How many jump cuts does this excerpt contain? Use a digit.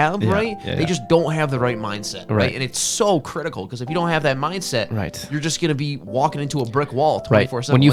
0